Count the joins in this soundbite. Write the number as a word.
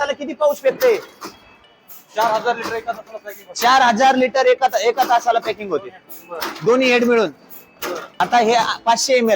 one